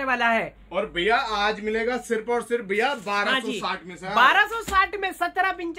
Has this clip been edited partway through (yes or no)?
no